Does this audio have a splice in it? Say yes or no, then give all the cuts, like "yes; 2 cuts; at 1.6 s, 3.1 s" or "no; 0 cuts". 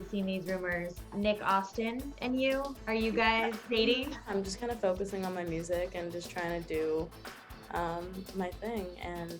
yes; 5 cuts; at 1.1 s, 2.1 s, 2.8 s, 3.6 s, 4.3 s